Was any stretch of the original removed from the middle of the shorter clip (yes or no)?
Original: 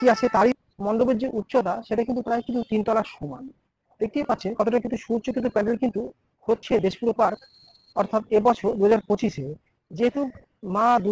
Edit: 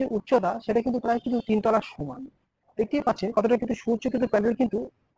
no